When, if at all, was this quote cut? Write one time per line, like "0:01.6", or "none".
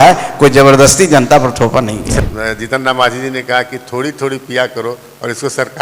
0:02.1